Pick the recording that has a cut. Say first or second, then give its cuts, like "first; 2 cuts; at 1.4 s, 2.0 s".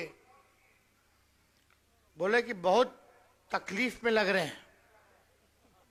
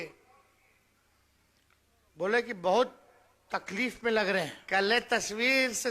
second; 1 cut; at 4.6 s